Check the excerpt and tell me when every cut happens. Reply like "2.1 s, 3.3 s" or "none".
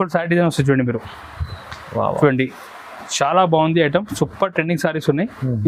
none